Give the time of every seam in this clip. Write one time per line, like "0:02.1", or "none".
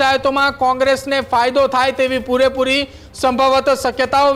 none